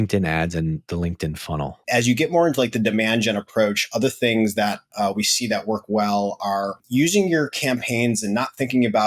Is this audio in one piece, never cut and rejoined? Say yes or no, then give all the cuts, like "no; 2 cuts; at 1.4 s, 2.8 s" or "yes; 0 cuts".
no; 2 cuts; at 1.7 s, 6.8 s